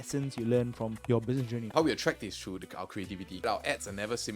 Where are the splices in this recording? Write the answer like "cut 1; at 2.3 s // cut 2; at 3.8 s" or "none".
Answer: cut 1; at 1.2 s // cut 2; at 3.4 s